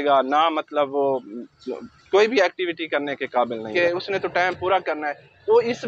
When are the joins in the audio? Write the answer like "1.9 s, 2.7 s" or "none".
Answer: 3.7 s